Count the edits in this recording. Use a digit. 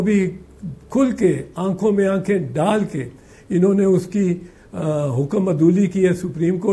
0